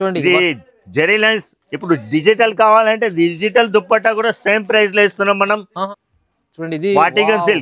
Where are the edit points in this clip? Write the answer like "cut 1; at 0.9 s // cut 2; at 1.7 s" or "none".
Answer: cut 1; at 6.0 s